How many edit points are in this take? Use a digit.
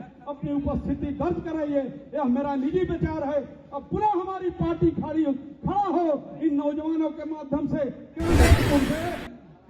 1